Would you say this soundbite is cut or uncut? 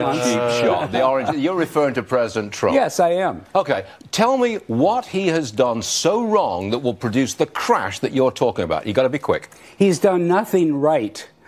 uncut